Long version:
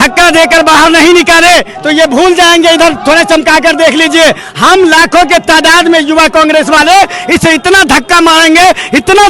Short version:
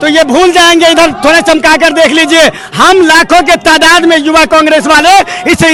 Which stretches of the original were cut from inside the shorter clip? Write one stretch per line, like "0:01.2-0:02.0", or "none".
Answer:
none